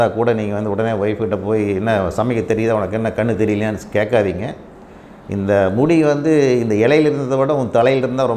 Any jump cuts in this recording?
no; 0 cuts

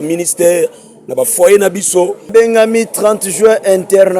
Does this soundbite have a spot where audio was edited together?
yes; 1 cut; at 2.3 s

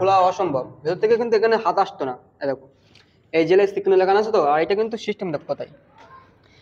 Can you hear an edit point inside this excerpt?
no; 0 cuts

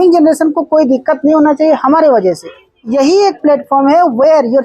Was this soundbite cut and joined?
yes; 1 cut; at 2.8 s

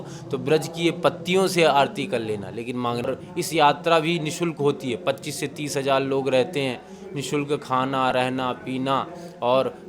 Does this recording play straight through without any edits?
no; 1 cut; at 3.1 s

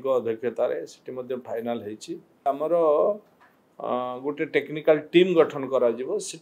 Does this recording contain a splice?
yes; 1 cut; at 2.5 s

